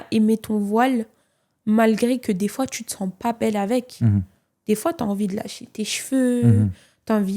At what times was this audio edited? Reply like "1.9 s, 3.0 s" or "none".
none